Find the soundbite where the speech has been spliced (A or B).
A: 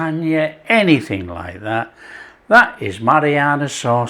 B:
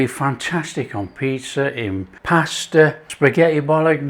B